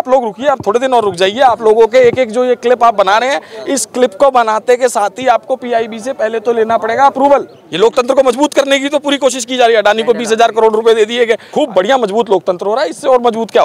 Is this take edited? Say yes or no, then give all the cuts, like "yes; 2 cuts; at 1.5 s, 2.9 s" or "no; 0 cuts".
yes; 2 cuts; at 7.6 s, 11.5 s